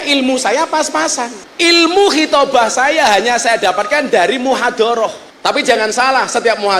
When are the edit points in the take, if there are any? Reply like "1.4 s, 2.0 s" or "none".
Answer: 1.4 s, 5.3 s